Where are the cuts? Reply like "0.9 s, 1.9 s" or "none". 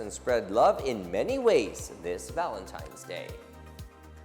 3.3 s